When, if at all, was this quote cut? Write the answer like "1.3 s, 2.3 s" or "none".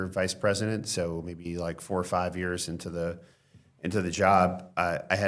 none

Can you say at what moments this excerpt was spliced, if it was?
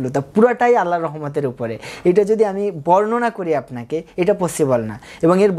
none

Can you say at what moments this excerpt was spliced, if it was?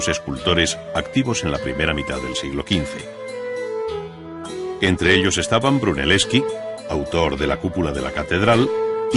7.1 s

